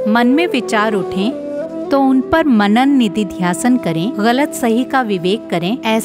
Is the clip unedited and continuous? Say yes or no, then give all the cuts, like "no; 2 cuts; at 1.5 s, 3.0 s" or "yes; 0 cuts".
yes; 0 cuts